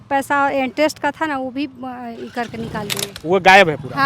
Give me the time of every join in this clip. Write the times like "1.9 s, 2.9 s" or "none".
3.1 s